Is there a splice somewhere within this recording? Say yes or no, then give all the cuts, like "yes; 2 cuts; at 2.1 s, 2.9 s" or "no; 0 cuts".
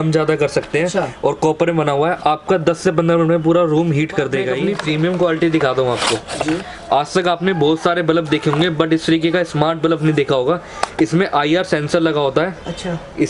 yes; 1 cut; at 4.6 s